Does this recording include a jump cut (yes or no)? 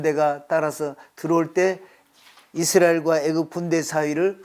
no